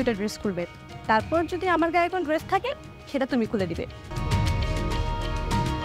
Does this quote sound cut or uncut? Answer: cut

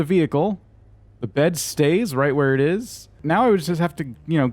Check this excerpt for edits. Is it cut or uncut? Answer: cut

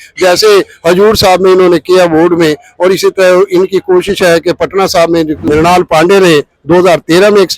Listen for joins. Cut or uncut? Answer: cut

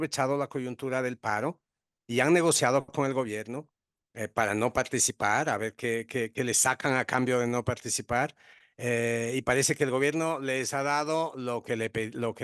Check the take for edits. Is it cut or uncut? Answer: uncut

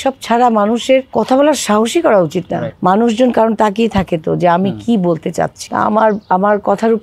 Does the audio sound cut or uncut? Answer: cut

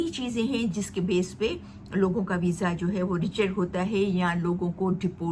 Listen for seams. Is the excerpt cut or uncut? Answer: uncut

